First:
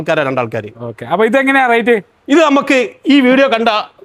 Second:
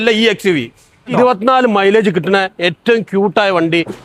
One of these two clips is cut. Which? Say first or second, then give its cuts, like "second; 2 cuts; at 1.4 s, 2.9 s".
second; 1 cut; at 1.1 s